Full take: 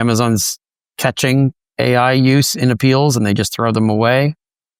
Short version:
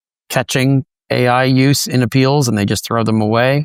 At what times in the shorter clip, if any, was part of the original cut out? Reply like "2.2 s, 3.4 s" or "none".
none